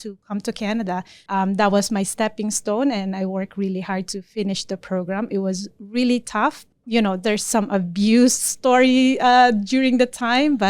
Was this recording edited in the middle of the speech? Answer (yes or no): yes